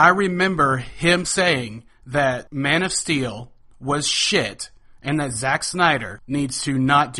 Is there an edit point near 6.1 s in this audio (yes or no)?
yes